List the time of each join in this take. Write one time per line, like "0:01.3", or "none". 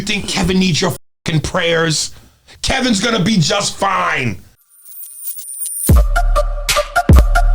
0:04.8